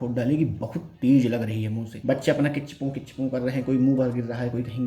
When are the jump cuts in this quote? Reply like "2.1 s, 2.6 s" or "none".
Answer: 1.8 s